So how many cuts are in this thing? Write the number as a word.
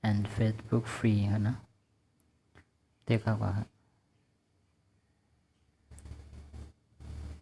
one